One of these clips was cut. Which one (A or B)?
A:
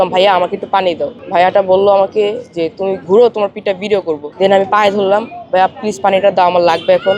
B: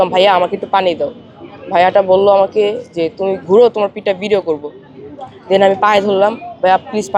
A